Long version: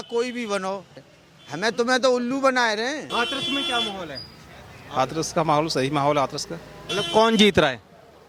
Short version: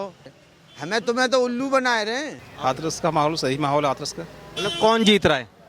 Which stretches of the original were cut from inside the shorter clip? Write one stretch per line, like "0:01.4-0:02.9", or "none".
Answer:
0:03.0-0:04.6